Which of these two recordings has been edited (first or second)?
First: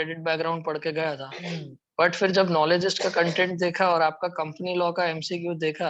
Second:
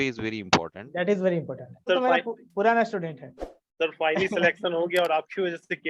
second